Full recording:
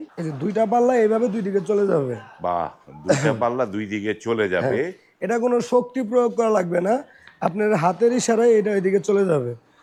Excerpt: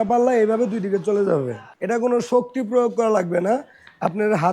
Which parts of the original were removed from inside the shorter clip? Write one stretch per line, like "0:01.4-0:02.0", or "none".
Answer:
0:02.3-0:05.0